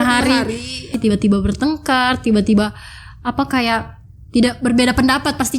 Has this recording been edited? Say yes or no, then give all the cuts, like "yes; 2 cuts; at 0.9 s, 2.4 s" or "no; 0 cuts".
yes; 1 cut; at 0.9 s